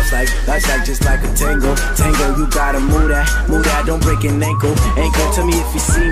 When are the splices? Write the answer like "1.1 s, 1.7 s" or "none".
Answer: none